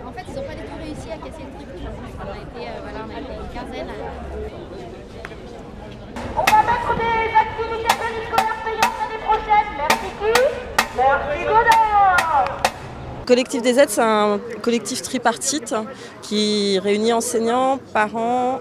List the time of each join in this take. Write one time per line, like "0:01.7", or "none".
0:07.3